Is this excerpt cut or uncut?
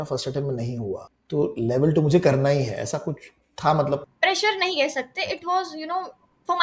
cut